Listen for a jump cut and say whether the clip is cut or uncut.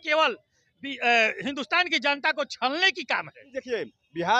cut